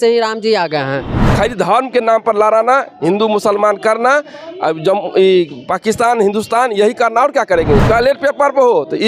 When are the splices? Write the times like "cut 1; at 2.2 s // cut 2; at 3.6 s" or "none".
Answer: cut 1; at 1.3 s // cut 2; at 7.8 s